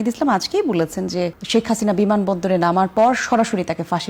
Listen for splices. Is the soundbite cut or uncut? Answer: uncut